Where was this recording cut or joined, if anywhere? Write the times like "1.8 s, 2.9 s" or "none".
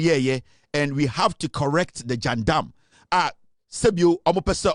none